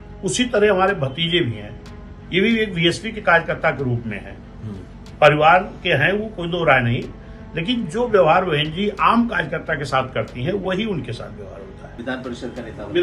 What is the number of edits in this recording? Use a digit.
1